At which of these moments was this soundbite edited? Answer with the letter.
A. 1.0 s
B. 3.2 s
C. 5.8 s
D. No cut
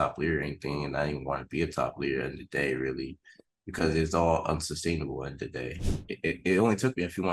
C